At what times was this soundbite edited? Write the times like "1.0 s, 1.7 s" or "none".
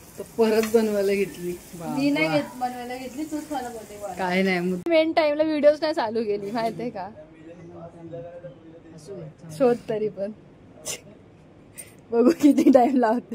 4.9 s